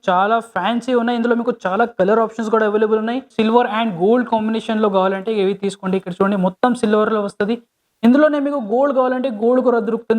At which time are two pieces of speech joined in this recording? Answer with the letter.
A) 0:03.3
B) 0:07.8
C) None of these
A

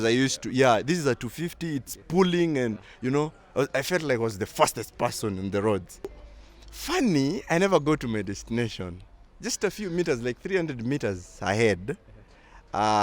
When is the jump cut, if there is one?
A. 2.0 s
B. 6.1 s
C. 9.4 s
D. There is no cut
B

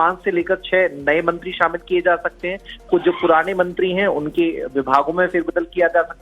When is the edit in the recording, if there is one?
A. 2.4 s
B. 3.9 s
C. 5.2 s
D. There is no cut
A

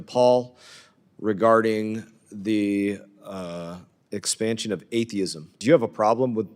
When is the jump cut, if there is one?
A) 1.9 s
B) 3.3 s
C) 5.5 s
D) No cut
C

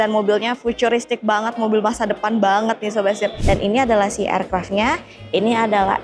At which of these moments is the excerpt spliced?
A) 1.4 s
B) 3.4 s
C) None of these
B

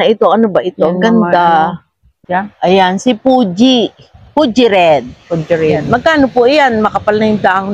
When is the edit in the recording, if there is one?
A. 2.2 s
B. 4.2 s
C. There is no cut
A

